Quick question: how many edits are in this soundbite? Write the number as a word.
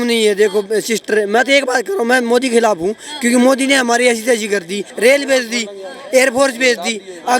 one